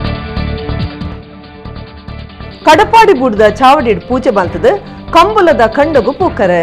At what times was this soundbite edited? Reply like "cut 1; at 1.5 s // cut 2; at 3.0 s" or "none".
cut 1; at 1.1 s